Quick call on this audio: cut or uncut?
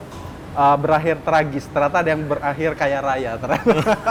uncut